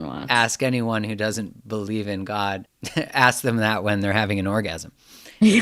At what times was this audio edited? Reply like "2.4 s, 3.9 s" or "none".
2.8 s